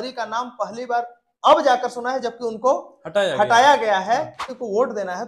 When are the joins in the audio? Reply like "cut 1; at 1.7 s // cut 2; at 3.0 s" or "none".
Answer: cut 1; at 4.4 s